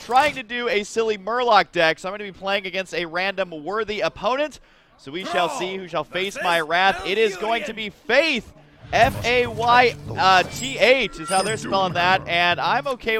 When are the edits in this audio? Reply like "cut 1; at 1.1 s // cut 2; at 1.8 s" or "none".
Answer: cut 1; at 3.6 s